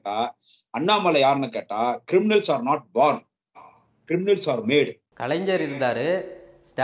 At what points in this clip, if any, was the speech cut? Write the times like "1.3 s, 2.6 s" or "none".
5.1 s